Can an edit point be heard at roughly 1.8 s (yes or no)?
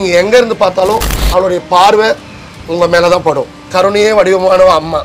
no